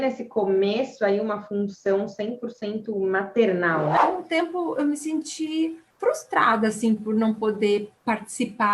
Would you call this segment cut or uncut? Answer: cut